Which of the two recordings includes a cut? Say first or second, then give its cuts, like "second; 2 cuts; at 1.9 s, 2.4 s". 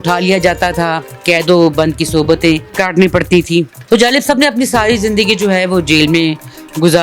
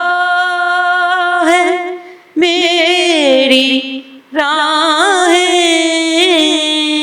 first; 3 cuts; at 1.1 s, 2.7 s, 3.8 s